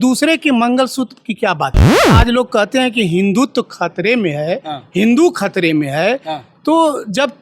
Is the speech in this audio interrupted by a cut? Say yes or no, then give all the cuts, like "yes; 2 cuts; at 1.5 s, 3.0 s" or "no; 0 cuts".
yes; 1 cut; at 2.1 s